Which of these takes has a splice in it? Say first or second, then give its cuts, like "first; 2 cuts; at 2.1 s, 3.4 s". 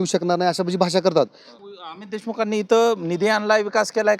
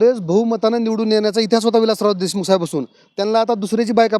first; 1 cut; at 1.5 s